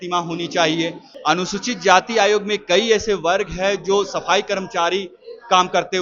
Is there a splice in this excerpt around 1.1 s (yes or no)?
yes